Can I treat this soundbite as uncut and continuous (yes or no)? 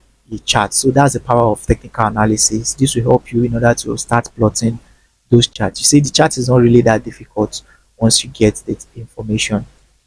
yes